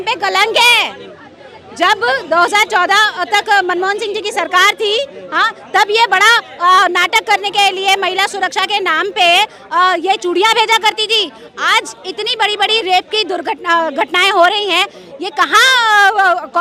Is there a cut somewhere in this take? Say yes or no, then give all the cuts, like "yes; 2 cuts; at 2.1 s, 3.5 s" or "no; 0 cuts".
no; 0 cuts